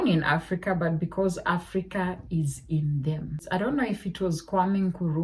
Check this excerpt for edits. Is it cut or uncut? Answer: cut